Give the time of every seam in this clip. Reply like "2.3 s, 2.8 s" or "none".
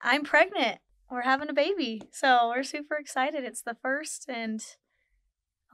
none